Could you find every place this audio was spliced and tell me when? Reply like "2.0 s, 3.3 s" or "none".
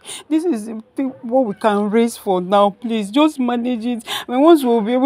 none